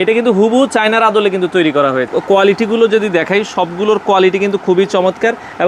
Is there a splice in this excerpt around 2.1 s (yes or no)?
yes